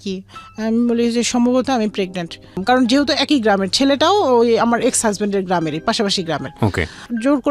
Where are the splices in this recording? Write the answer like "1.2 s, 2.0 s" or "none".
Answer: 2.6 s

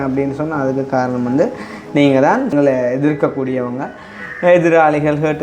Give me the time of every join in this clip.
2.5 s

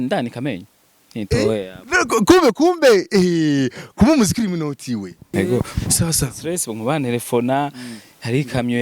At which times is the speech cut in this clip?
5.3 s

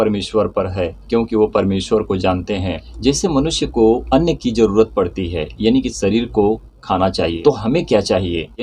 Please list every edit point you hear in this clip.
2.8 s, 4.0 s, 7.4 s

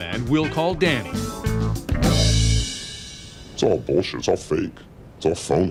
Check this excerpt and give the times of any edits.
none

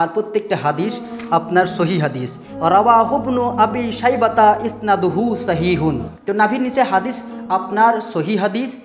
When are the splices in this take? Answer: 2.4 s, 6.1 s

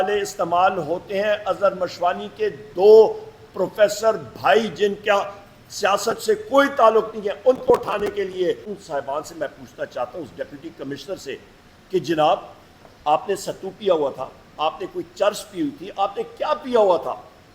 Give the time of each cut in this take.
8.7 s

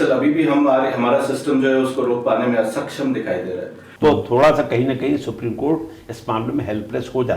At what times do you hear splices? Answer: 3.8 s

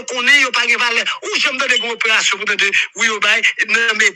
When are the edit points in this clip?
none

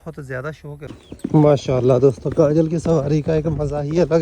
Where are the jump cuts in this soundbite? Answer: 0.9 s

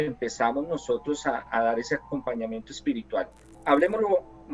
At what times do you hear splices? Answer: 3.6 s

